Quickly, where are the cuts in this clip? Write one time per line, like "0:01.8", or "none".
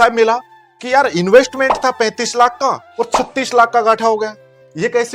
none